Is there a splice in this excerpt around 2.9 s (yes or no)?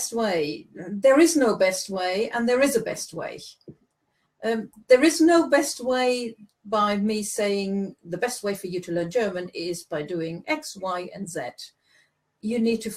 no